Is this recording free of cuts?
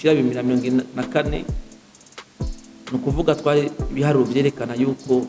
no; 2 cuts; at 1.5 s, 2.9 s

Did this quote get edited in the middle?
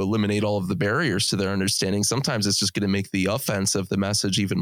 no; 0 cuts

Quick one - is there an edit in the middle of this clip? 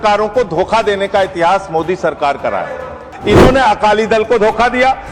yes; 1 cut; at 3.1 s

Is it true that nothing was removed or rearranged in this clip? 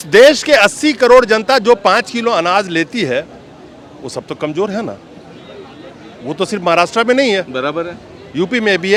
yes; 0 cuts

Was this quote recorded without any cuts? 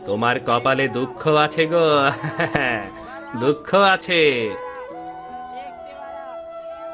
yes; 0 cuts

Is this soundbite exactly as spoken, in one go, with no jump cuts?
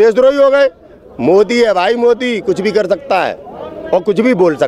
yes; 0 cuts

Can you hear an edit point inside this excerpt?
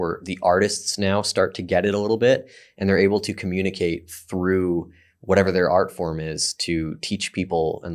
no; 0 cuts

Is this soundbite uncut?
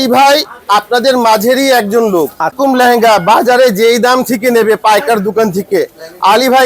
no; 1 cut; at 2.5 s

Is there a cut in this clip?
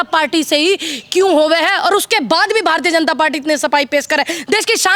no; 0 cuts

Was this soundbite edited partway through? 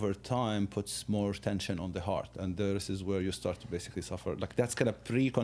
no; 0 cuts

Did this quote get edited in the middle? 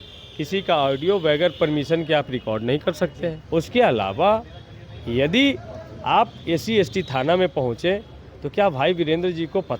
yes; 1 cut; at 3.4 s

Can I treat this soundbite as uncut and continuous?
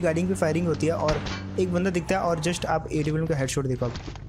yes; 0 cuts

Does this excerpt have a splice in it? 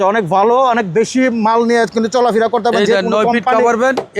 no; 0 cuts

